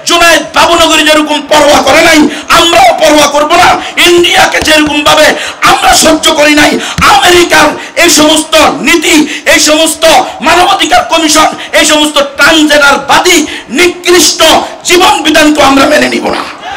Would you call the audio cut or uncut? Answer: uncut